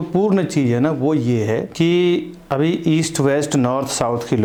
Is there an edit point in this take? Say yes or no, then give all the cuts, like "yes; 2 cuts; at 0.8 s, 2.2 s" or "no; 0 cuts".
no; 0 cuts